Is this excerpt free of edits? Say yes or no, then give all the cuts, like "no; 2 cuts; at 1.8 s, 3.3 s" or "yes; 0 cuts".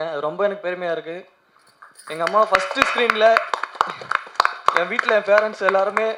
yes; 0 cuts